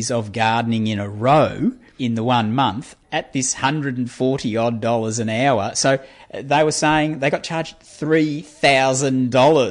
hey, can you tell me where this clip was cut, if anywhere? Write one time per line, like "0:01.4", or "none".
0:01.9
0:02.9